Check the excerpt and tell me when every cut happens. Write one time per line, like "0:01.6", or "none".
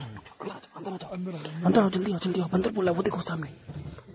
none